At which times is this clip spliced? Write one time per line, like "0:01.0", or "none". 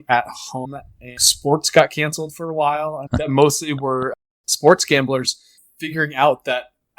0:01.3
0:03.1